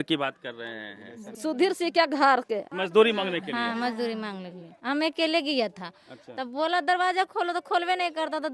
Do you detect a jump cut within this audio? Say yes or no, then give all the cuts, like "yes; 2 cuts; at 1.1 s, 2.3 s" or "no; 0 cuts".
yes; 3 cuts; at 1.3 s, 2.7 s, 4.7 s